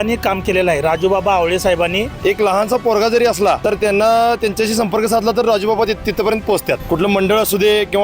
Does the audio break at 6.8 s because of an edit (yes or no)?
yes